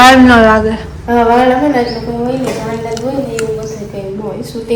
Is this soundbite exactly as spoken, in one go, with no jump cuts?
yes; 0 cuts

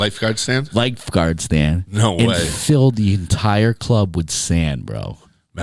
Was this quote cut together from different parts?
no; 0 cuts

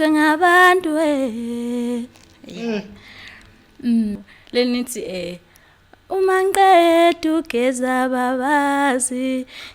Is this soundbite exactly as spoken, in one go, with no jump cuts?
no; 1 cut; at 4.2 s

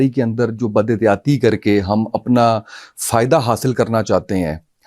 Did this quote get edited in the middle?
no; 0 cuts

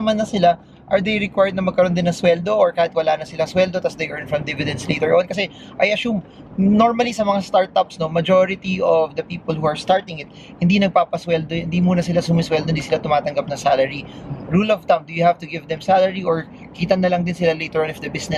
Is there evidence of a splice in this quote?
no; 0 cuts

